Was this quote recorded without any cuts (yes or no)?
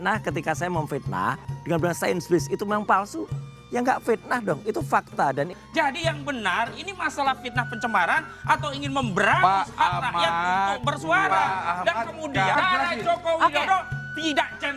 no